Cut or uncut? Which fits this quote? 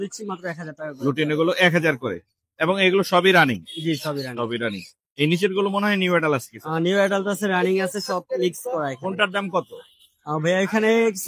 uncut